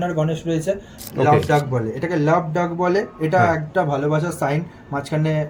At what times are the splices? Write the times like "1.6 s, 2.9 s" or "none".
0.9 s

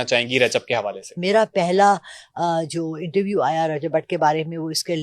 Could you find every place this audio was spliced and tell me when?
1.2 s

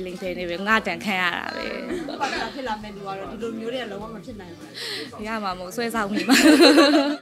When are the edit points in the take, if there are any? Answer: 2.1 s

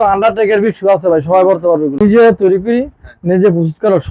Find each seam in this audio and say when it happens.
2.0 s

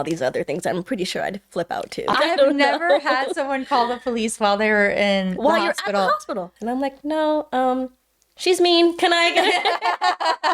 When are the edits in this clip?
2.1 s, 6.5 s

